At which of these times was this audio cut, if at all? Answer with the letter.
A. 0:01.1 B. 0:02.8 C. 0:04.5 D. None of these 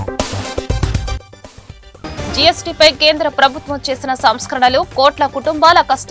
A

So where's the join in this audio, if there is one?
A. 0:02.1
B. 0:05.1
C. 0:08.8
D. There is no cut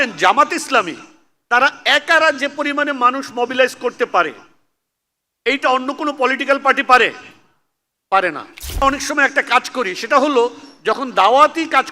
C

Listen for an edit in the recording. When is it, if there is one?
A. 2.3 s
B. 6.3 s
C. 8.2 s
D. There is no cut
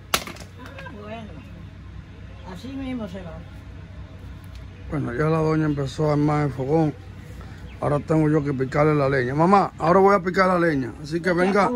D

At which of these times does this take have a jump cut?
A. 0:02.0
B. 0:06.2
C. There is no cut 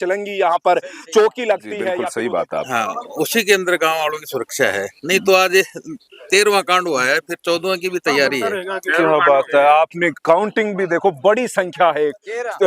A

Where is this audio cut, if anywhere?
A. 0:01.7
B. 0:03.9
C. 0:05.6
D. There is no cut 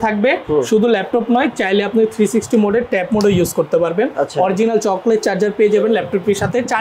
D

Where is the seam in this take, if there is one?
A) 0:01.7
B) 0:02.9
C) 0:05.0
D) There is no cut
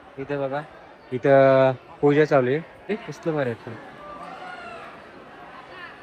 B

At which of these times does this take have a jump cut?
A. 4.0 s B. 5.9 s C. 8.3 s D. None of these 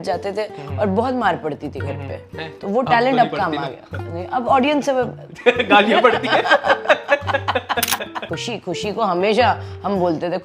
C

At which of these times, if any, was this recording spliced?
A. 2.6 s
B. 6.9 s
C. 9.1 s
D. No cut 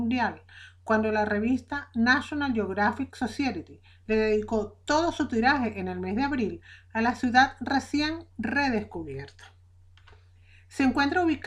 A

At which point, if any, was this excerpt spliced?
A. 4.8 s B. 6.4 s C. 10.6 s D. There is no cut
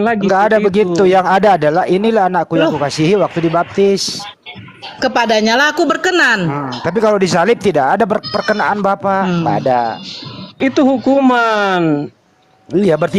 C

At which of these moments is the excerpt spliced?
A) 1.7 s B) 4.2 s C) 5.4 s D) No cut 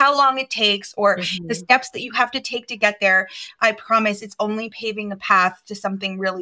D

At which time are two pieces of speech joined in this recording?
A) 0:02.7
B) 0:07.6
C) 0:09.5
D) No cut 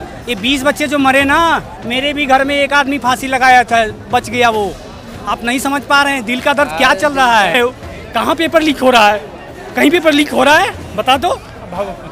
B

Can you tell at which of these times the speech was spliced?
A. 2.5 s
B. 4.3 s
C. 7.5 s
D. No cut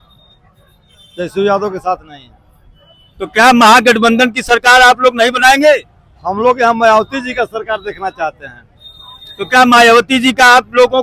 D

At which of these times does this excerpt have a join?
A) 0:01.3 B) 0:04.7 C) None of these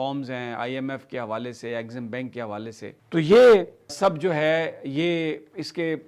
C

